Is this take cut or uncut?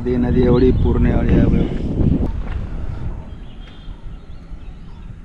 cut